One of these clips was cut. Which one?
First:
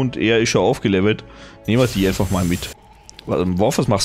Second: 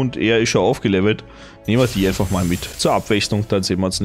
first; 1 cut; at 2.7 s

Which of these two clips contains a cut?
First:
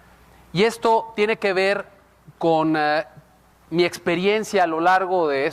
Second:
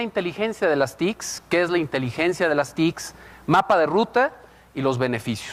first; 1 cut; at 3.7 s

